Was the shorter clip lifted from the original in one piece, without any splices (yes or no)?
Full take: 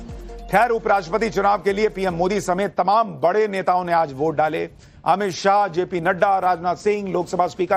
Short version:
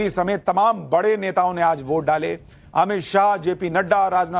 yes